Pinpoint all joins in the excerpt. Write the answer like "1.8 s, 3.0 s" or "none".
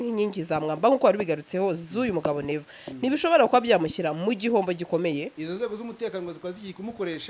5.3 s